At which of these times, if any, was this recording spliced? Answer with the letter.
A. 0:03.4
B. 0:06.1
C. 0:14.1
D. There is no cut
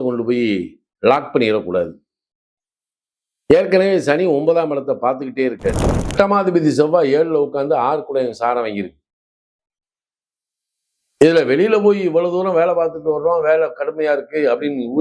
B